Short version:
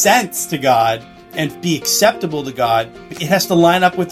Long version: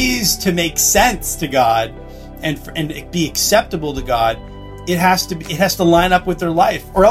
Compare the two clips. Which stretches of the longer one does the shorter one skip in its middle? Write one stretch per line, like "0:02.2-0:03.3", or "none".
0:02.4-0:03.0
0:04.6-0:05.4